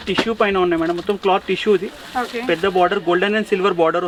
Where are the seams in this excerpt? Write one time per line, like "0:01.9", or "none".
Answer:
none